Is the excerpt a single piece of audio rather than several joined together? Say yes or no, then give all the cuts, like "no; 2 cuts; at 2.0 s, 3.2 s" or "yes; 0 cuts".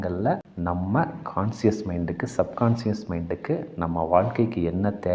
yes; 0 cuts